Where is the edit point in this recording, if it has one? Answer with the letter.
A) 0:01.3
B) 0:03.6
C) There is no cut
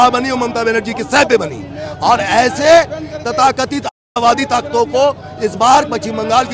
C